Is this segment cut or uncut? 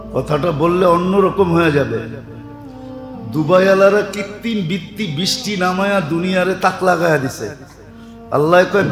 uncut